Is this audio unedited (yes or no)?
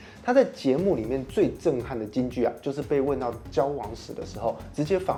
yes